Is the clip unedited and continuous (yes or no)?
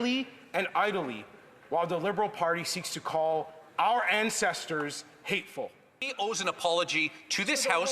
no